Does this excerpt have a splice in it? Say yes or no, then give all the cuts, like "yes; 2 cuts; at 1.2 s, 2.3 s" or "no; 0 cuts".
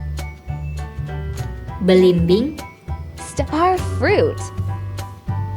yes; 2 cuts; at 1.8 s, 4.4 s